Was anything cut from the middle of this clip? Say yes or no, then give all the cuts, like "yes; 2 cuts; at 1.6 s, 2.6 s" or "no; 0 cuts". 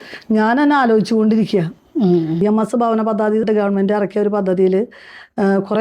yes; 2 cuts; at 2.4 s, 3.5 s